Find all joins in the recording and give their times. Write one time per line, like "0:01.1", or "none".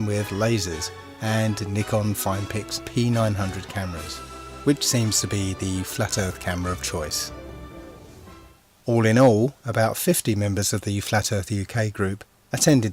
none